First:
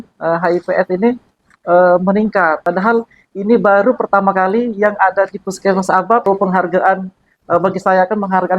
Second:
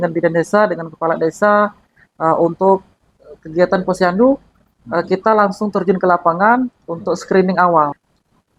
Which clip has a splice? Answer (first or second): first